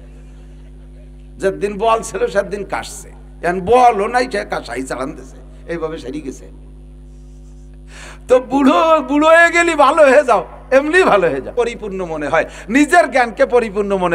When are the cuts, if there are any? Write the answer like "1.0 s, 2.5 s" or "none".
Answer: 11.5 s

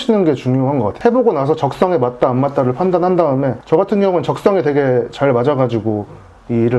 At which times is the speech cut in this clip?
none

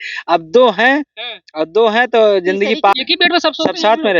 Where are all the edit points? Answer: 2.9 s

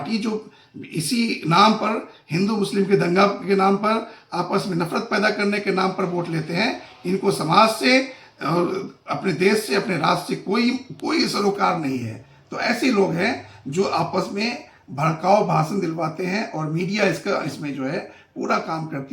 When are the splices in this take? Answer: none

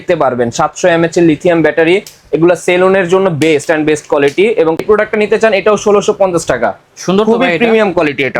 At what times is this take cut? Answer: 4.8 s

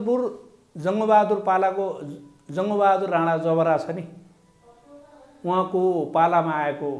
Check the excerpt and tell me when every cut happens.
none

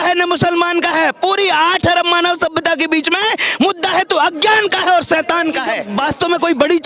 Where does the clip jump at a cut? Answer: 5.9 s

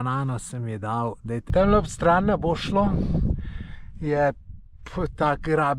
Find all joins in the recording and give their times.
1.5 s

